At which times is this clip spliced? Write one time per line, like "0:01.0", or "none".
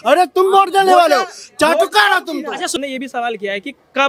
none